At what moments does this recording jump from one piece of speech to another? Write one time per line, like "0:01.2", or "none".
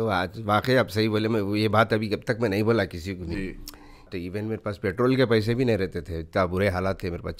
0:04.1